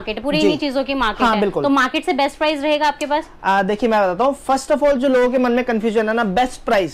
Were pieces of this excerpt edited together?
no; 0 cuts

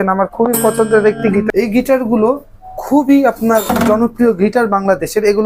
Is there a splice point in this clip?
yes; 1 cut; at 1.5 s

